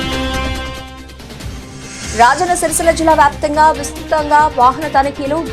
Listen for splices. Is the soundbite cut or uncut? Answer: cut